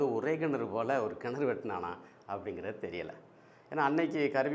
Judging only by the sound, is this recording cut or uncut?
uncut